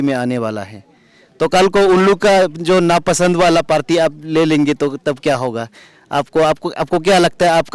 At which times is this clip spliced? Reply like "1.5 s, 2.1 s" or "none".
none